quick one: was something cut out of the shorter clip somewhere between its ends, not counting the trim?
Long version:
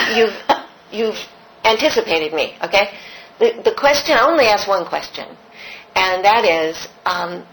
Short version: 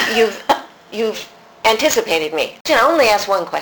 yes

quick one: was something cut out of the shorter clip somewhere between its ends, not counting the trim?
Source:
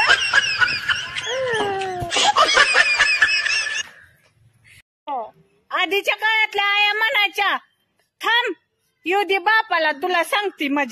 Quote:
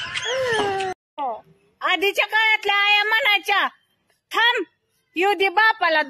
yes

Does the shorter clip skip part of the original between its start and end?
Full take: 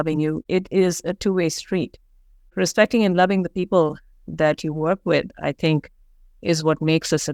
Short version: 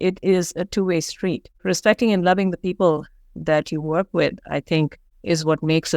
yes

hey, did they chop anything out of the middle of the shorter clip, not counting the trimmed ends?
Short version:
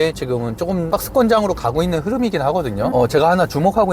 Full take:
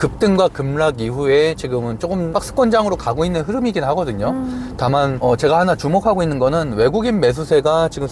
yes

